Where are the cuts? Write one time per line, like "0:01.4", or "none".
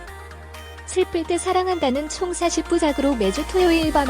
0:00.9